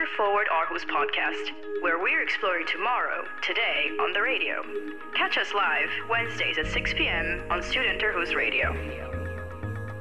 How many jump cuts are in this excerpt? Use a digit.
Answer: 0